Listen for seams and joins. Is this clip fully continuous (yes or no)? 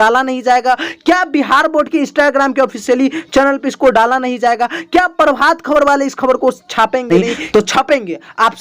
no